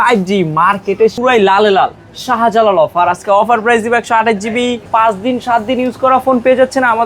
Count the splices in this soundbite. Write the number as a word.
two